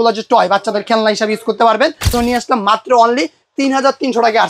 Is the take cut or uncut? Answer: cut